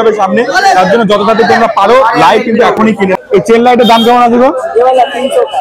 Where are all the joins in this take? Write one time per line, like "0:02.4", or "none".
0:03.2